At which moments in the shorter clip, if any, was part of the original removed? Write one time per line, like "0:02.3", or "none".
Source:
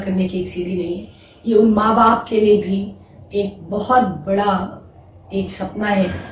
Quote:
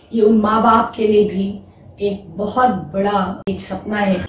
0:03.4